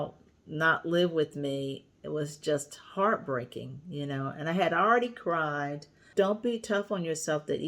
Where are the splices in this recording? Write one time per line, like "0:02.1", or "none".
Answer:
0:06.0